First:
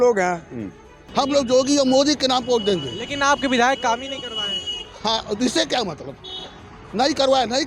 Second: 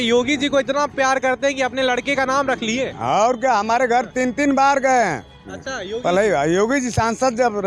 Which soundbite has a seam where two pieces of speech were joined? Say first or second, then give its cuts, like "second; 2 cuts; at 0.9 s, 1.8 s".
first; 1 cut; at 1.0 s